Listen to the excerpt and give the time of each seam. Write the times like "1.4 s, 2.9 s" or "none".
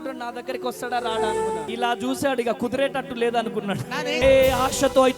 1.7 s, 4.2 s